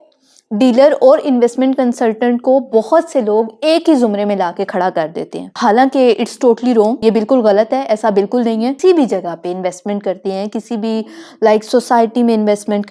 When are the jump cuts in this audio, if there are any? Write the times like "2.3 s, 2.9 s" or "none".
5.6 s, 7.0 s, 8.7 s